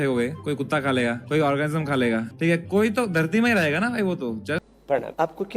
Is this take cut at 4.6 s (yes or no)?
yes